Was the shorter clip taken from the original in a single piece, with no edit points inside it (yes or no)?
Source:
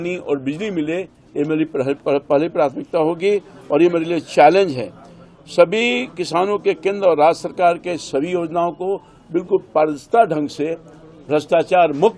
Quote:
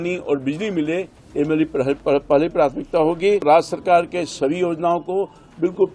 no